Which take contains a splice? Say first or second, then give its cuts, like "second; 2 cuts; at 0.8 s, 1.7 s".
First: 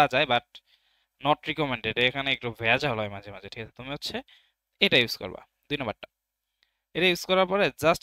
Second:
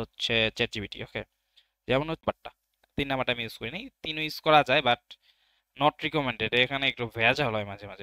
second; 1 cut; at 2.2 s